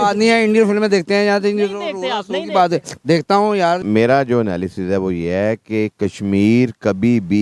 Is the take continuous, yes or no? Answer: no